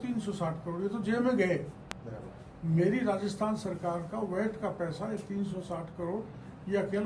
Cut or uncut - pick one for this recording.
uncut